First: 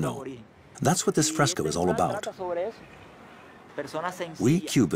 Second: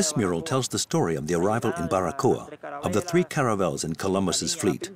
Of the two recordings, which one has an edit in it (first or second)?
first